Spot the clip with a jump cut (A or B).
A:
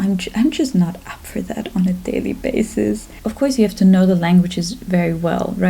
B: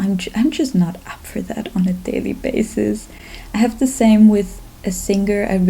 A